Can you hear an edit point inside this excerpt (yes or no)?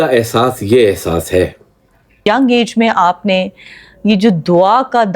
yes